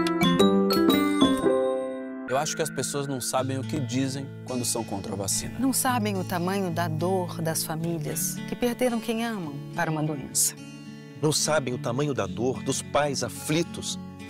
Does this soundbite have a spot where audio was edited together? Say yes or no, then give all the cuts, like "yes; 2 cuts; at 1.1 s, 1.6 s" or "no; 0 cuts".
yes; 1 cut; at 2.2 s